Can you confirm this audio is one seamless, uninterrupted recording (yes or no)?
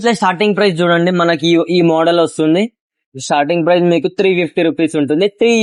yes